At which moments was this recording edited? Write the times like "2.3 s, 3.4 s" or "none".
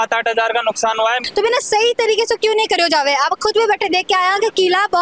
1.2 s